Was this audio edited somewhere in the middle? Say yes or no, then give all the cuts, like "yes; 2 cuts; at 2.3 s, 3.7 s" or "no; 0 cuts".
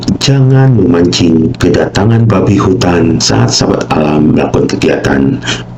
yes; 2 cuts; at 1.5 s, 3.2 s